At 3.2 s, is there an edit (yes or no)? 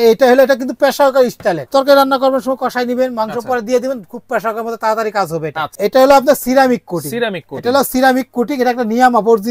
no